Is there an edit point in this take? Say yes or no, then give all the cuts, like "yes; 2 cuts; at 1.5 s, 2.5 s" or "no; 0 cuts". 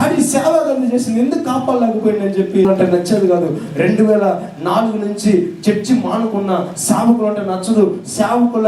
yes; 1 cut; at 2.6 s